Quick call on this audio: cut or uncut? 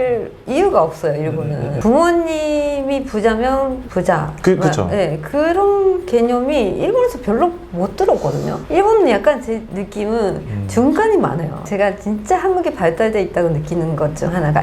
cut